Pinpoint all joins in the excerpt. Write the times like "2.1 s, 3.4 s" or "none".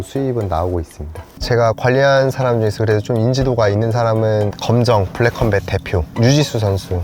1.2 s, 4.6 s, 6.1 s